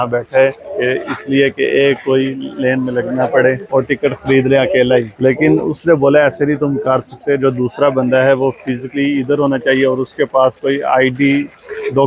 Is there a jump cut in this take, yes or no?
no